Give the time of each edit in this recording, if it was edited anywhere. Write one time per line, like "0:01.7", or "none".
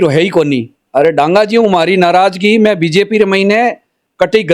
none